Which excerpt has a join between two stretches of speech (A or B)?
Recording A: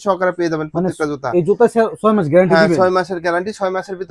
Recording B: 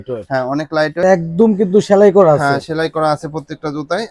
B